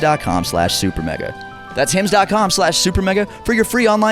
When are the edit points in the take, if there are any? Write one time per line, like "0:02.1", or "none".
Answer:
none